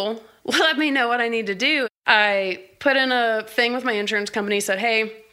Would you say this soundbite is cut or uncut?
cut